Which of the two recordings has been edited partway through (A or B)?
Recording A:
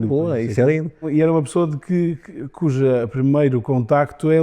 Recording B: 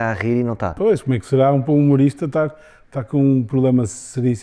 A